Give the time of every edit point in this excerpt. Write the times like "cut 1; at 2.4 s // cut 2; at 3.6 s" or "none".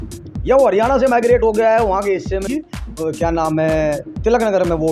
cut 1; at 2.4 s